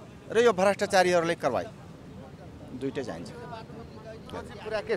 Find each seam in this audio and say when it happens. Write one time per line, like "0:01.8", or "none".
none